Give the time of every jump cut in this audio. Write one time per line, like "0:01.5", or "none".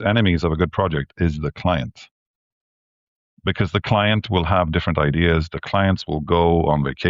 none